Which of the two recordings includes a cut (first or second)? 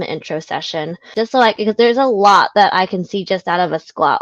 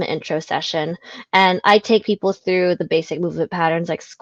first